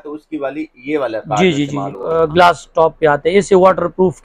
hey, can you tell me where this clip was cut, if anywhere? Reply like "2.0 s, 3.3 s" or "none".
2.0 s